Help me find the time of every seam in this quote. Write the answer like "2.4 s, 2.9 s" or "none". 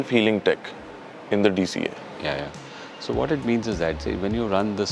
none